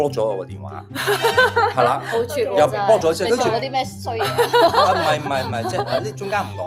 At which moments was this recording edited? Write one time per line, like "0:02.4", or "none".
none